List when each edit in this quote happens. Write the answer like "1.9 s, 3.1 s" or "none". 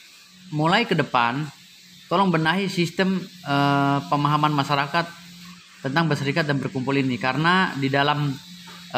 none